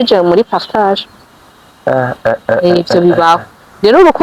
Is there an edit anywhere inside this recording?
no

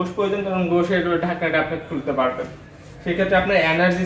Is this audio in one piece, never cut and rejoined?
yes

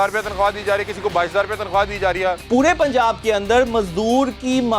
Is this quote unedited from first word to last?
no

